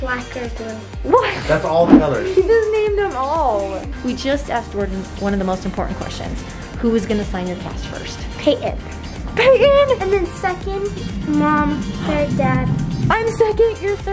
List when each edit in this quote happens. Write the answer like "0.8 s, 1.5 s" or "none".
3.9 s

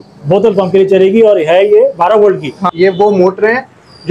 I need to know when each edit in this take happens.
2.6 s

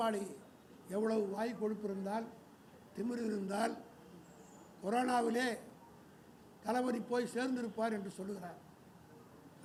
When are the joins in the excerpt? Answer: none

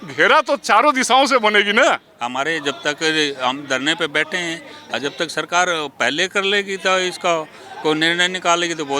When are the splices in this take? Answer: 2.1 s

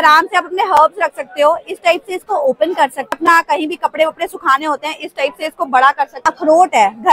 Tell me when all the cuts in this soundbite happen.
3.1 s, 6.2 s

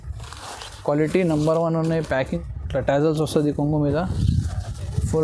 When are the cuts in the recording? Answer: 2.4 s

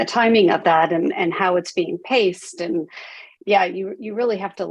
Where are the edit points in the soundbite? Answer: none

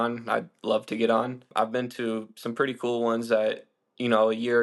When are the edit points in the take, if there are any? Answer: 1.4 s

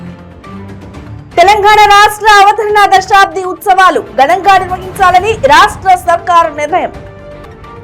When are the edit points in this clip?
none

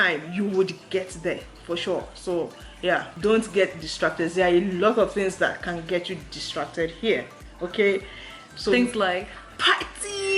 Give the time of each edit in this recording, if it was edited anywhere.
3.1 s, 9.4 s

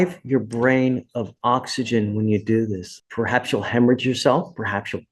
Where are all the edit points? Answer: 2.9 s

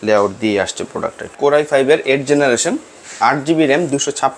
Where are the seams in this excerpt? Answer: 1.3 s

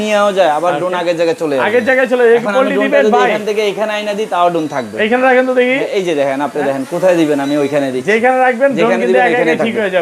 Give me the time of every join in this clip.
none

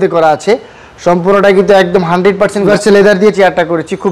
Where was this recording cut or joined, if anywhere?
2.7 s

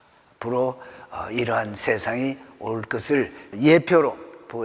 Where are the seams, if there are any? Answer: 3.5 s

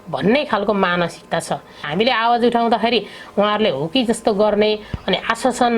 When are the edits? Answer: 1.9 s

